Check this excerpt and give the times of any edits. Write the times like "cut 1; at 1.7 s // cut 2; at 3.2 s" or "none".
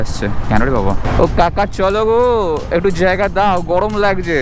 cut 1; at 1.0 s

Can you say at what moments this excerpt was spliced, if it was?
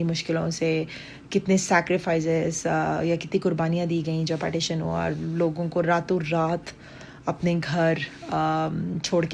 none

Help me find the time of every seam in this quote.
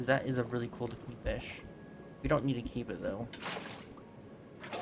none

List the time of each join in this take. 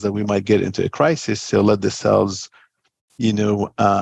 none

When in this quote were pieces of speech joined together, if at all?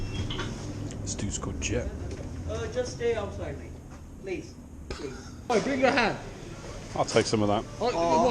cut 1; at 5.5 s

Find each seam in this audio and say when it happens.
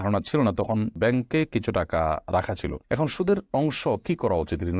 none

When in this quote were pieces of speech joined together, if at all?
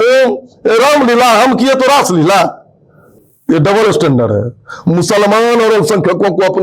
none

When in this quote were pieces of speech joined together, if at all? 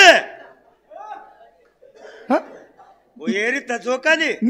none

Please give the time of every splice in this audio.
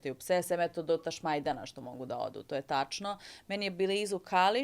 none

